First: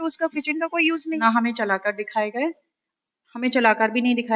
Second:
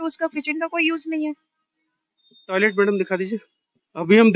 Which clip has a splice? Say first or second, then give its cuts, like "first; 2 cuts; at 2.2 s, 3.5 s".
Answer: first; 1 cut; at 1.2 s